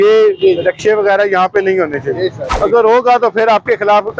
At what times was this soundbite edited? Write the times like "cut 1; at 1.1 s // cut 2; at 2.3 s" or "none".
cut 1; at 2.4 s